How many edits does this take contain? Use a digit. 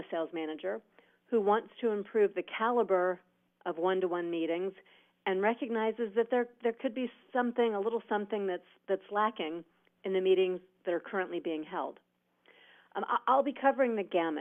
0